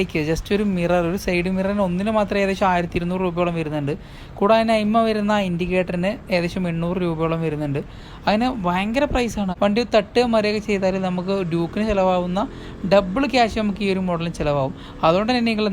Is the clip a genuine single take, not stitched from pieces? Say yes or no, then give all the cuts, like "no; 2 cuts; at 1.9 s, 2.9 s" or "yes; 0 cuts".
no; 1 cut; at 9.5 s